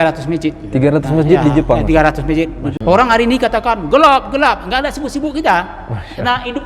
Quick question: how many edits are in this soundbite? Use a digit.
1